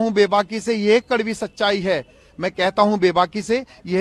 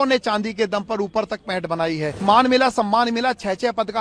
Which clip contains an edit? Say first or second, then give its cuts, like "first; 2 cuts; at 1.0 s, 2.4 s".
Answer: second; 1 cut; at 2.2 s